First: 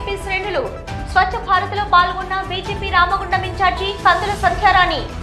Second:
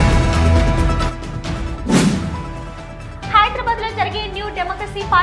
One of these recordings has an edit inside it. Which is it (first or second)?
second